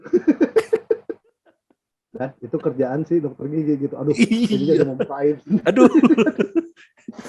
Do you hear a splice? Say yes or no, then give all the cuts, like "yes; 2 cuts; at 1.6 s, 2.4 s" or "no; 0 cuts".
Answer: no; 0 cuts